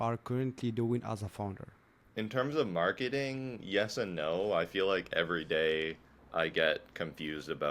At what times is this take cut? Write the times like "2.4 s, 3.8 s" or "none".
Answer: none

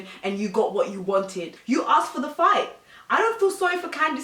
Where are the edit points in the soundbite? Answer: 1.5 s

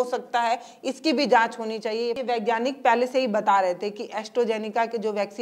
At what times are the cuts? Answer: 2.2 s

